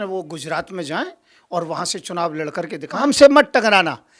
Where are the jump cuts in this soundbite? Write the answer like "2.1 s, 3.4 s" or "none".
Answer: 3.0 s